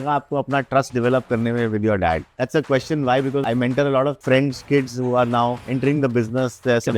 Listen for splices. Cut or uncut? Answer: cut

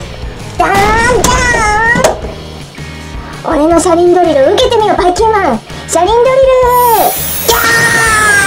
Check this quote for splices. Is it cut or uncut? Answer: uncut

